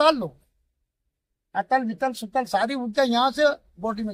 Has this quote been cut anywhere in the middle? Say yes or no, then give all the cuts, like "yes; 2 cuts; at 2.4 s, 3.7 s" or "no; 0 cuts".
no; 0 cuts